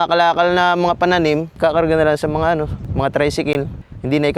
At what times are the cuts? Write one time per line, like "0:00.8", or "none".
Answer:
0:01.6
0:02.8
0:03.5